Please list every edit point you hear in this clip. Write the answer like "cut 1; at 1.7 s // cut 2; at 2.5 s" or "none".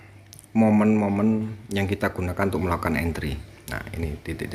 none